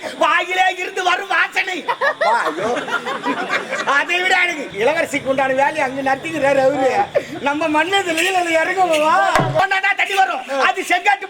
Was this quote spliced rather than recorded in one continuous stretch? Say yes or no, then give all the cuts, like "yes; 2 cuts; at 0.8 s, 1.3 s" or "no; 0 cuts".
yes; 2 cuts; at 4.6 s, 9.6 s